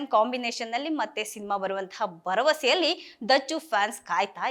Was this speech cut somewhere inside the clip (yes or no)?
no